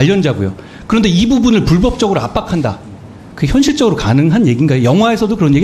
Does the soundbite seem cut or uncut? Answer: uncut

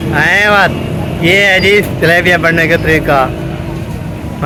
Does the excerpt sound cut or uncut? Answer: uncut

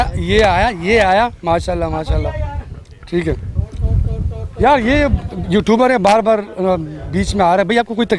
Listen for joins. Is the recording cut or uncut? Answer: uncut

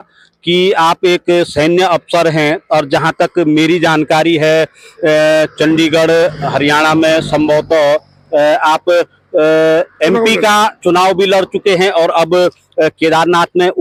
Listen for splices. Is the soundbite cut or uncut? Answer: uncut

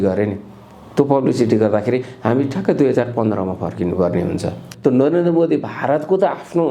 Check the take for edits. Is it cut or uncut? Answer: cut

